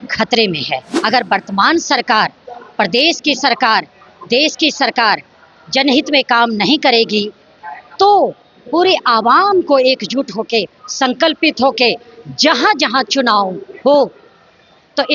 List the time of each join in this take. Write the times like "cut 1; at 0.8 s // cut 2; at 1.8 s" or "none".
cut 1; at 0.9 s

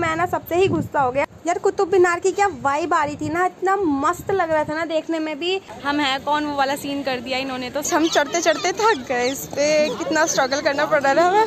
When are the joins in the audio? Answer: cut 1; at 1.2 s // cut 2; at 5.7 s // cut 3; at 7.9 s

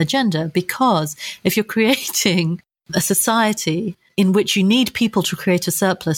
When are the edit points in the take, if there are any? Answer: none

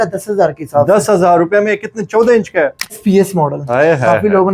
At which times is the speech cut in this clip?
cut 1; at 3.0 s

